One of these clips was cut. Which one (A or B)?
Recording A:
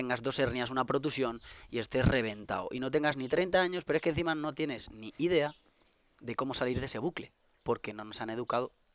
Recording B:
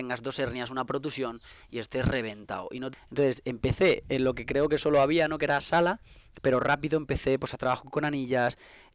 B